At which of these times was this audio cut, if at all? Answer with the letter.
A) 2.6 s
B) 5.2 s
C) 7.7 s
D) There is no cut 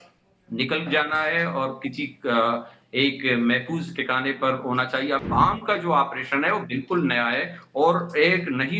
B